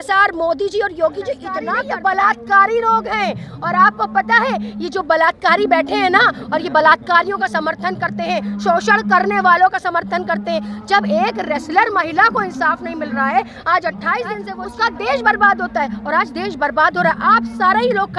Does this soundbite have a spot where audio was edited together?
yes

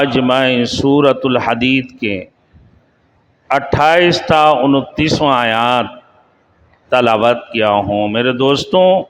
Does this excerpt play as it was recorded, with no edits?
yes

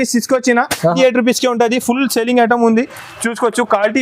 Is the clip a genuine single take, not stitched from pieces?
no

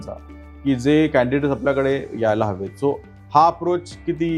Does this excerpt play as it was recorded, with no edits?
yes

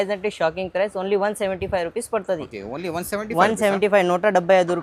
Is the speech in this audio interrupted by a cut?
no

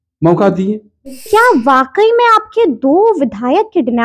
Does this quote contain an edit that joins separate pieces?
yes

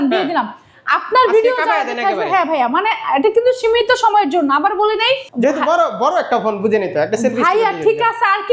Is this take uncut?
no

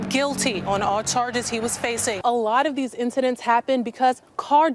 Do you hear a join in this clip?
yes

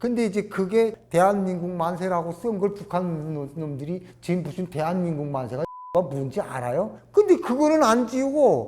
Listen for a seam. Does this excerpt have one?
yes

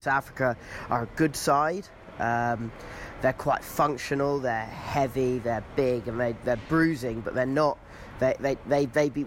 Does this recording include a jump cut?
no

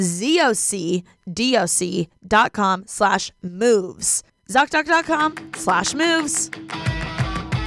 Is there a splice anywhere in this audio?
yes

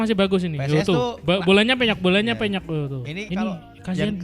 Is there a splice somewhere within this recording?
yes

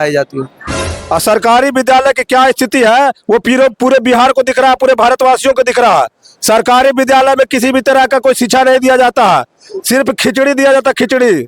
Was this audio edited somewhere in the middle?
yes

